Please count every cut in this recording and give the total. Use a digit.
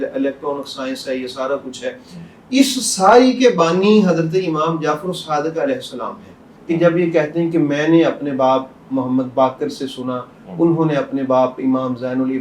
1